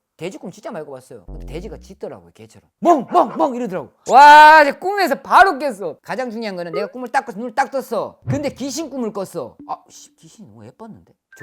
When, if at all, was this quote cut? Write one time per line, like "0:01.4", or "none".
0:02.7
0:06.0
0:09.6